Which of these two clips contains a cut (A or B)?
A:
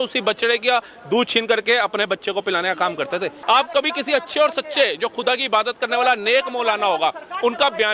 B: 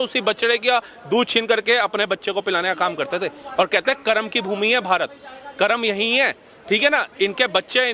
A